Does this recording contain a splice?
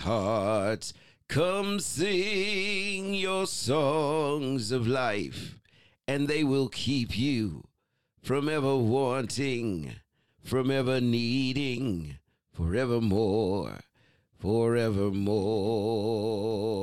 no; 0 cuts

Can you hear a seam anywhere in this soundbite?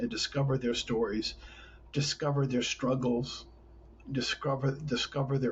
no; 0 cuts

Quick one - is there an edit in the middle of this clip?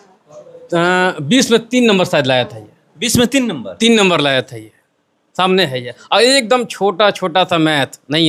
no; 0 cuts

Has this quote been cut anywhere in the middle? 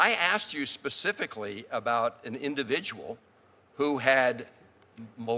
no; 0 cuts

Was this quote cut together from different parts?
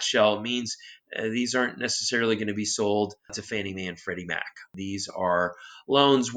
no; 0 cuts

